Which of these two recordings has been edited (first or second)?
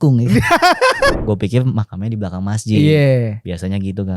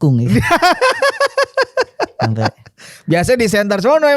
first